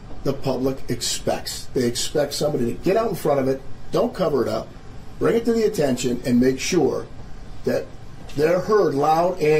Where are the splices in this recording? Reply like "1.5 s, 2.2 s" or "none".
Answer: none